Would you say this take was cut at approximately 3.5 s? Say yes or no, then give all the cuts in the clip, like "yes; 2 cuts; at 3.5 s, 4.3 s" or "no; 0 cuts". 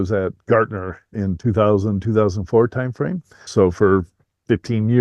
yes; 1 cut; at 3.5 s